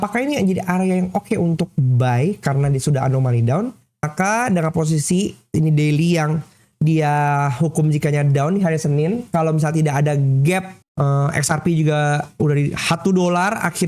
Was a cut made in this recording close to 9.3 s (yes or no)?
no